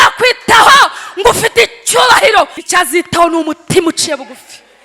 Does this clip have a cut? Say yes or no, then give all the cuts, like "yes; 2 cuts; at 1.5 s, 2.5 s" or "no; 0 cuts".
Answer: yes; 1 cut; at 2.6 s